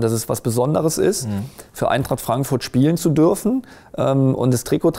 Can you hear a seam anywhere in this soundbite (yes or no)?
no